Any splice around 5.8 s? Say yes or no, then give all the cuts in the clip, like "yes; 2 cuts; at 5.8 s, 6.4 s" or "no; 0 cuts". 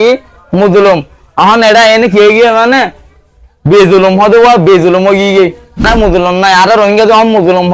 yes; 1 cut; at 5.8 s